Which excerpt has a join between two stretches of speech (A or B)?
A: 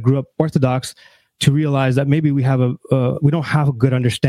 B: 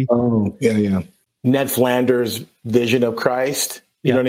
B